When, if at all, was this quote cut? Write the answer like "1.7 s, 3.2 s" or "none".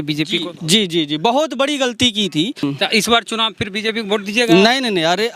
2.5 s